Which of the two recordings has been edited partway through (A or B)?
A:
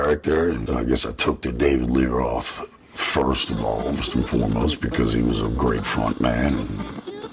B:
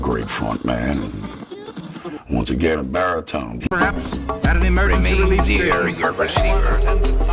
B